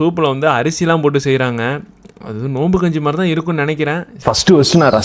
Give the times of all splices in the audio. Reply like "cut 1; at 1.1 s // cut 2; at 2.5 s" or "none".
cut 1; at 4.1 s